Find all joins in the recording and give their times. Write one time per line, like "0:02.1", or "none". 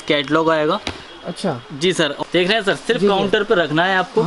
0:02.1